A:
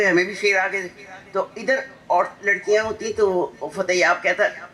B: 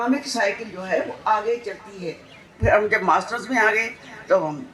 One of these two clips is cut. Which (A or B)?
B